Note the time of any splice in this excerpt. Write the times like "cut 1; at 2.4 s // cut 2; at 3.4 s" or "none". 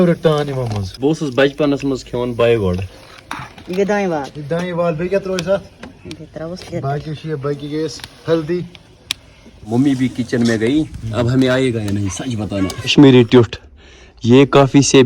cut 1; at 2.9 s // cut 2; at 9.5 s // cut 3; at 12.9 s